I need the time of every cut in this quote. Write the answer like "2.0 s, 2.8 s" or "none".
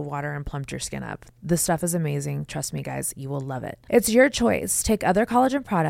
none